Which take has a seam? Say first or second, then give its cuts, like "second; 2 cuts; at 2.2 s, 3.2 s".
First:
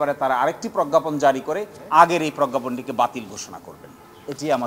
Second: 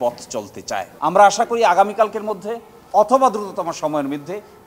second; 1 cut; at 0.9 s